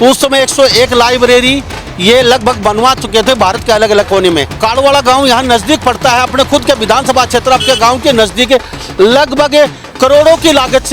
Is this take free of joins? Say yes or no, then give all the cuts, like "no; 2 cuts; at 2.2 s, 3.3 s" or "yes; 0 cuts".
no; 1 cut; at 4.5 s